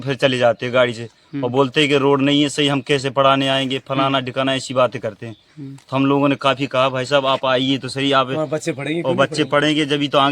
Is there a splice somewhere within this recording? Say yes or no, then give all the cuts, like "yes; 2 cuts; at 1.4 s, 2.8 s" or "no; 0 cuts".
no; 0 cuts